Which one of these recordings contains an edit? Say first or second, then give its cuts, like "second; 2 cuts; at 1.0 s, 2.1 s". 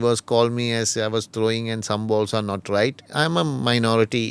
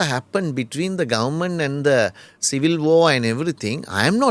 first; 1 cut; at 3.0 s